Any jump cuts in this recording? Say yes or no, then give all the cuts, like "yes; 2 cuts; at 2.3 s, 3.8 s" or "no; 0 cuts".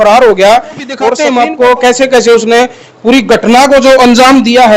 yes; 1 cut; at 1.2 s